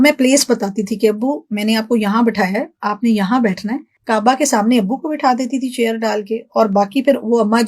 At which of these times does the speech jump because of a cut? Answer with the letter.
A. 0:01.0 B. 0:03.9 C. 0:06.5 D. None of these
B